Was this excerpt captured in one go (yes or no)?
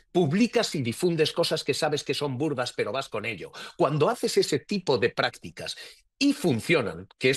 yes